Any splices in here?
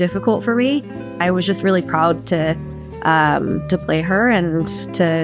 yes; 1 cut; at 1.2 s

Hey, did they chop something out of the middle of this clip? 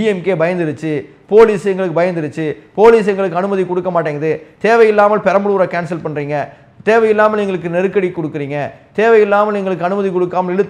no; 0 cuts

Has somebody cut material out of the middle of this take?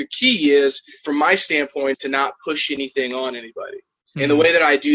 yes; 2 cuts; at 0.9 s, 1.9 s

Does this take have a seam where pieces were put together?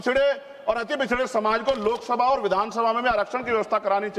no; 0 cuts

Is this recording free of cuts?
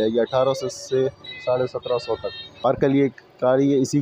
no; 1 cut; at 2.6 s

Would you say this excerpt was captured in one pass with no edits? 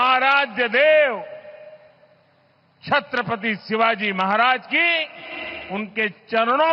yes; 0 cuts

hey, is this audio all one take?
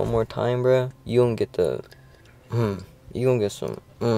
no; 1 cut; at 1.0 s

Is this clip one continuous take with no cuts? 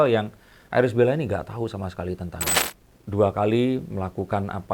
no; 1 cut; at 2.5 s

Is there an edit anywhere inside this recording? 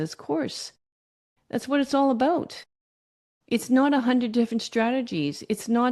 no; 0 cuts

